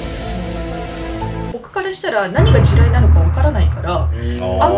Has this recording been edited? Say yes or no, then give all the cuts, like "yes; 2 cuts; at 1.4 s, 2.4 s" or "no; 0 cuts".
yes; 1 cut; at 1.6 s